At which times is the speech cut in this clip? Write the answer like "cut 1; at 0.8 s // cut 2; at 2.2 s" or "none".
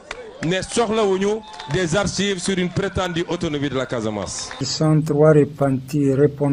cut 1; at 4.4 s